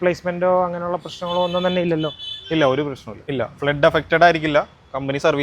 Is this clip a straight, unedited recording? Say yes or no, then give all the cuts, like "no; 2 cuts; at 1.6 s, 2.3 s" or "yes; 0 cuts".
no; 1 cut; at 3.2 s